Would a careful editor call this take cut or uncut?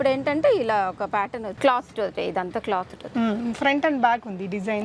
uncut